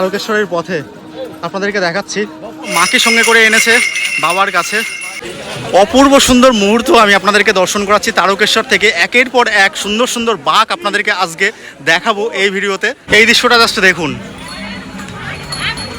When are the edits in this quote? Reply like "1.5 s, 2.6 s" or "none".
2.7 s, 5.2 s, 13.0 s